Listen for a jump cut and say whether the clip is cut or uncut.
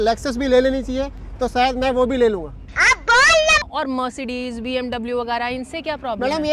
uncut